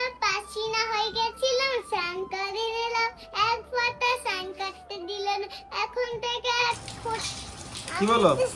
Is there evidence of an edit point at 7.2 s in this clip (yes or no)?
yes